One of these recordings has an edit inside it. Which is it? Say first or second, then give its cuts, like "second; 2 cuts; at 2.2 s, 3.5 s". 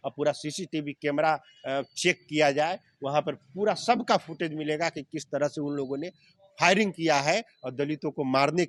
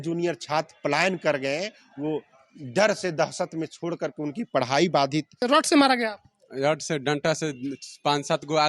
second; 1 cut; at 5.4 s